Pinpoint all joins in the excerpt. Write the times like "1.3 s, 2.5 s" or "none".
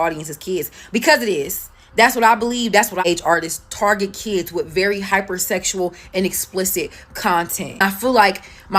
3.0 s